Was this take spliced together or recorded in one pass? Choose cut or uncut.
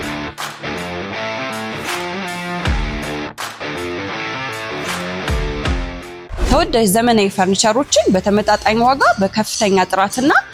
uncut